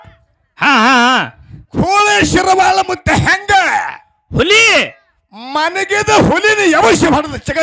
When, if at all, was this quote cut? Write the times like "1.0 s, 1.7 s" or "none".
1.8 s